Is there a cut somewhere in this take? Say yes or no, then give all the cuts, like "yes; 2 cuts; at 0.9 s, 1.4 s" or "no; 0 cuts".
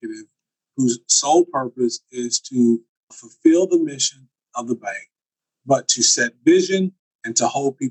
yes; 1 cut; at 3.2 s